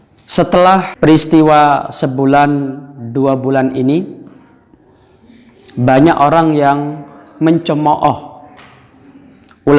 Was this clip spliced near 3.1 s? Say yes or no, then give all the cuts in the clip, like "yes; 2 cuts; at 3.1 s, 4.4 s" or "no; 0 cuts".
no; 1 cut; at 0.9 s